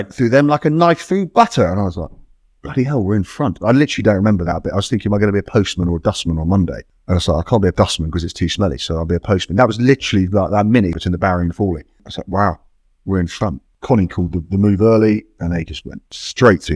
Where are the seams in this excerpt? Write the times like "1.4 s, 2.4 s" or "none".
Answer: 6.8 s, 7.7 s, 11.0 s, 12.1 s, 13.7 s